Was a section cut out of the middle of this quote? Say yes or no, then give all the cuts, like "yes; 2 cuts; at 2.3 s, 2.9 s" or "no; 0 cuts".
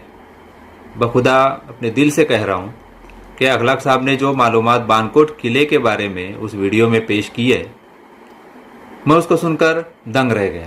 no; 0 cuts